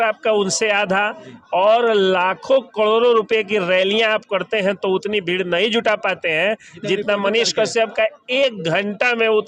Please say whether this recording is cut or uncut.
uncut